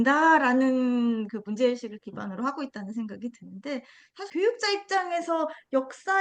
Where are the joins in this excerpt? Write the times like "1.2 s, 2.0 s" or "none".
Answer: 4.1 s